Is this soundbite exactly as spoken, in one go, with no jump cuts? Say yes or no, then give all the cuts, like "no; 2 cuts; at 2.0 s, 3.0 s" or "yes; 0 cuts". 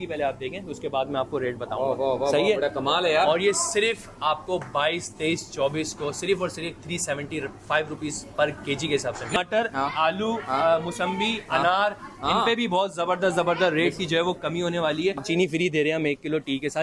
no; 2 cuts; at 9.4 s, 15.2 s